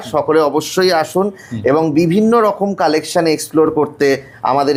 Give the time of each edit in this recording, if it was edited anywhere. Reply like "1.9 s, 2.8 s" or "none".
none